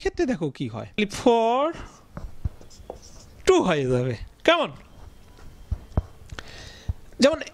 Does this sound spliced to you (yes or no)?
yes